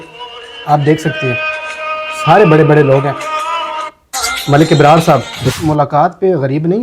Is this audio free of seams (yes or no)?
no